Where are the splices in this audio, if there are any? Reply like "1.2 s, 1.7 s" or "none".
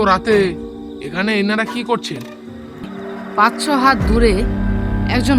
2.9 s